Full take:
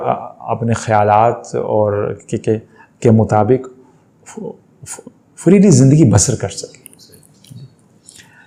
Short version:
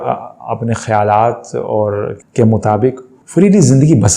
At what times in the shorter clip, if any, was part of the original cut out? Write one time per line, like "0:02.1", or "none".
0:02.2
0:03.1